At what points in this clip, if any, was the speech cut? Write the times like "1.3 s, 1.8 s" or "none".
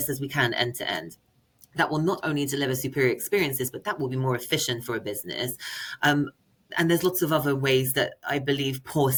none